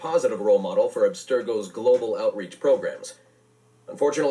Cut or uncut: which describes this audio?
uncut